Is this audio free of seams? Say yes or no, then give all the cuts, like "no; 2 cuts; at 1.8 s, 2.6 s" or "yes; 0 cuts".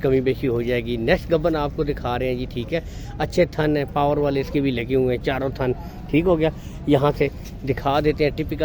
yes; 0 cuts